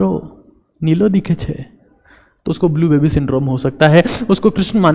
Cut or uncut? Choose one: uncut